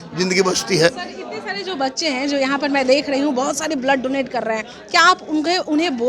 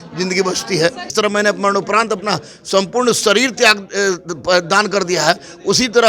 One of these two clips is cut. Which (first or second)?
second